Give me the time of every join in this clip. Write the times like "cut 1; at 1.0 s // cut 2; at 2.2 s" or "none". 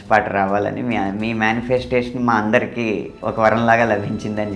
cut 1; at 3.1 s